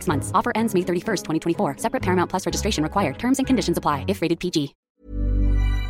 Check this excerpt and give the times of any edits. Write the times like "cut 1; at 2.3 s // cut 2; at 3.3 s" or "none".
cut 1; at 4.9 s